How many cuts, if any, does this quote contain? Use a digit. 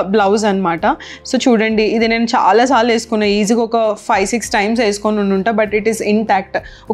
0